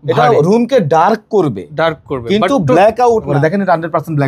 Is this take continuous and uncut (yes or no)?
no